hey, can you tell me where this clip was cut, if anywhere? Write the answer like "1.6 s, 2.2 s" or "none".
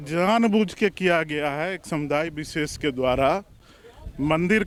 none